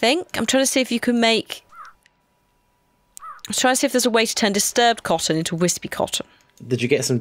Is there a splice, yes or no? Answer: no